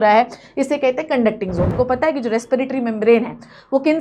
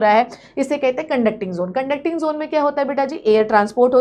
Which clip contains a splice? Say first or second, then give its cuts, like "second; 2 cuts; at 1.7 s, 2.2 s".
first; 1 cut; at 1.7 s